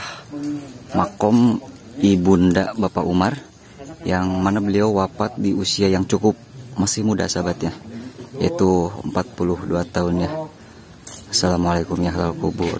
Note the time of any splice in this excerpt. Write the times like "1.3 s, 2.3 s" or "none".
none